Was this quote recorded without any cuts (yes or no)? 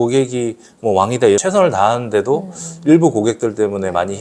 no